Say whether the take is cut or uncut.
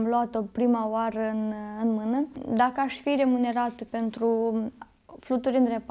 cut